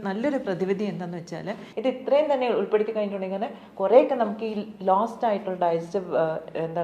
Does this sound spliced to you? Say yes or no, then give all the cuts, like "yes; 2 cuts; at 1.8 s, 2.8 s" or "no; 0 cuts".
yes; 1 cut; at 1.6 s